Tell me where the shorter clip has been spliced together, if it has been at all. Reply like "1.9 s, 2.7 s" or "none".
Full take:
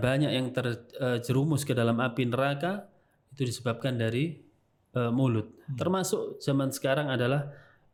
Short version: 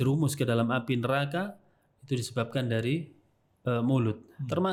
none